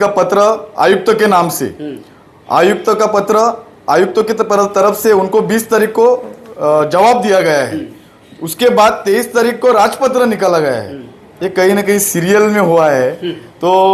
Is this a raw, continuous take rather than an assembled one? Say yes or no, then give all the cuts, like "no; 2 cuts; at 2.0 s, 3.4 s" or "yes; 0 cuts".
yes; 0 cuts